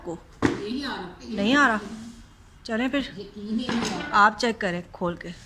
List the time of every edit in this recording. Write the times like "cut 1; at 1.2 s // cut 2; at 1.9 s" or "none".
none